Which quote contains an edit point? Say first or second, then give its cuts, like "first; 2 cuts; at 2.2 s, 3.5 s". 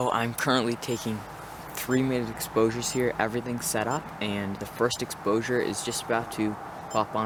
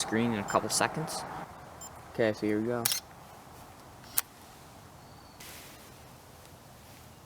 second; 2 cuts; at 1.4 s, 5.4 s